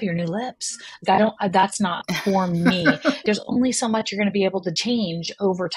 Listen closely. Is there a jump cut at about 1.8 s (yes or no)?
no